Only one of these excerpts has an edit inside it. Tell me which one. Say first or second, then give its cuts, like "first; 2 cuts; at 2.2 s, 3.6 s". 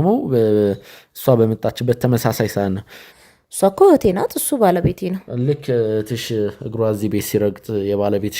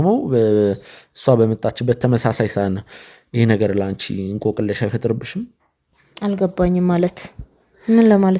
first; 1 cut; at 3.2 s